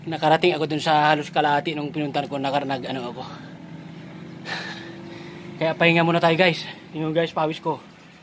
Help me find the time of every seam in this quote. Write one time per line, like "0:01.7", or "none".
none